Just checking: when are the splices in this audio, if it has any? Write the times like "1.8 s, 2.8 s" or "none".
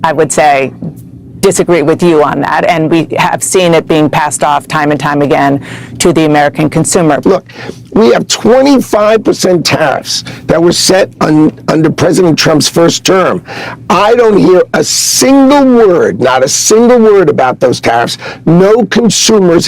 7.2 s

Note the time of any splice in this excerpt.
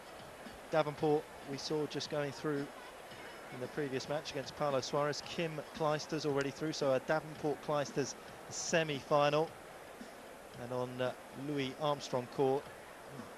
2.2 s

